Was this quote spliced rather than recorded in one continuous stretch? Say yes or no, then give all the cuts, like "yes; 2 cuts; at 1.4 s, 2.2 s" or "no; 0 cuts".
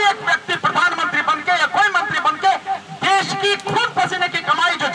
no; 0 cuts